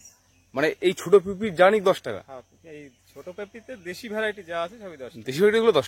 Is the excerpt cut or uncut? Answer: uncut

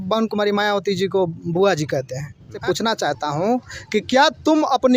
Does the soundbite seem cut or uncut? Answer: cut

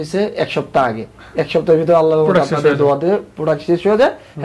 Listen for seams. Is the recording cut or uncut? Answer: uncut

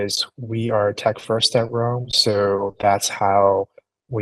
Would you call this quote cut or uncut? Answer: uncut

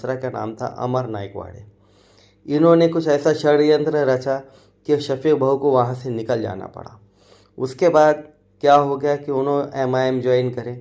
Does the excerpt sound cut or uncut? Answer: uncut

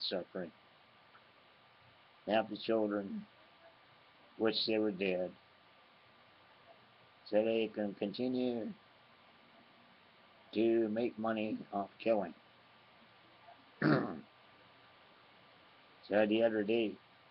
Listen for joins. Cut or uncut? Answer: uncut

